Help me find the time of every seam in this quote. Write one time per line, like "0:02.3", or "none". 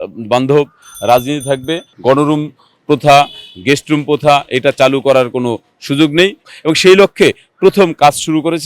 0:01.8
0:06.5